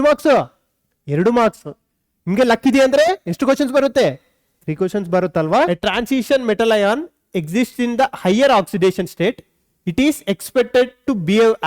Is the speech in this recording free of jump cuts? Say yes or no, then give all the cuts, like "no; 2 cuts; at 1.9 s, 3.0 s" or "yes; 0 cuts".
no; 1 cut; at 5.7 s